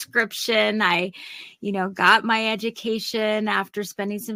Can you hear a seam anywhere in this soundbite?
no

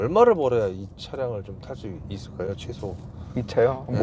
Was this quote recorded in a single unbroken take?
yes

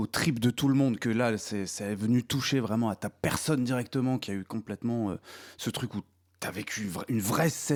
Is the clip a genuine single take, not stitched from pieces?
yes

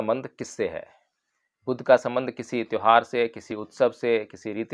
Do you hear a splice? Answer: no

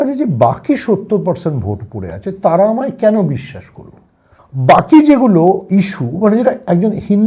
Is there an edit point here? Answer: no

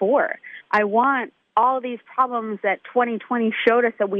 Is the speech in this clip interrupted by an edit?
yes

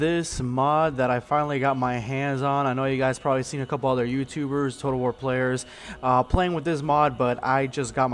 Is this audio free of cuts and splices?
yes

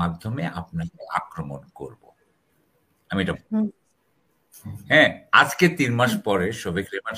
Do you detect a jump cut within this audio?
no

